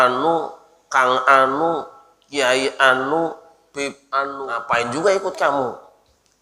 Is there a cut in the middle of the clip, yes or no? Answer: yes